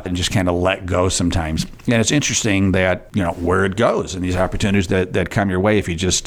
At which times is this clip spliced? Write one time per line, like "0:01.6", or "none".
0:03.1